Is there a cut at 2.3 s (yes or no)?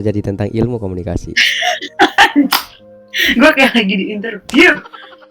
yes